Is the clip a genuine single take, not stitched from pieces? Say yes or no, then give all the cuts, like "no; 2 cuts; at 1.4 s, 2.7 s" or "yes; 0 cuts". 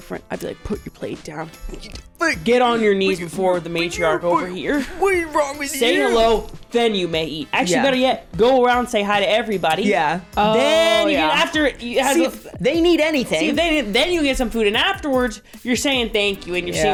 yes; 0 cuts